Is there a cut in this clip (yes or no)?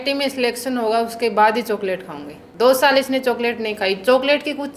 no